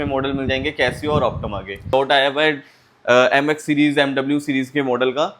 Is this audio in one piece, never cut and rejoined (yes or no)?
no